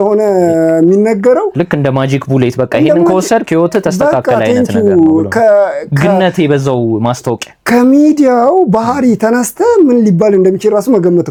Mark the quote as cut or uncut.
uncut